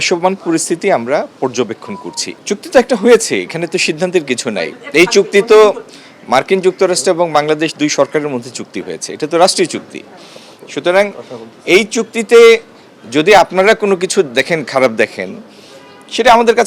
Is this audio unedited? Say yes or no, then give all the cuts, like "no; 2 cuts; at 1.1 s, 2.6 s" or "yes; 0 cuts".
no; 1 cut; at 2.3 s